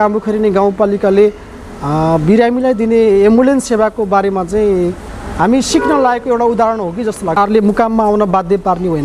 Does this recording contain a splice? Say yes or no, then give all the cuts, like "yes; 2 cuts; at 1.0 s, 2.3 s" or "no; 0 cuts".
yes; 1 cut; at 7.4 s